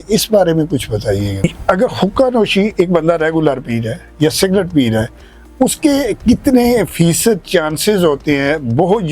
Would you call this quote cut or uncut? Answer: cut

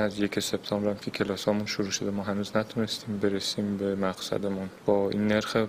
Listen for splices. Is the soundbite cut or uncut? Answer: cut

